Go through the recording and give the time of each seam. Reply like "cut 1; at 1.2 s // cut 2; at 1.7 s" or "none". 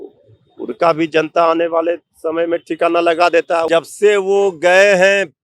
cut 1; at 3.7 s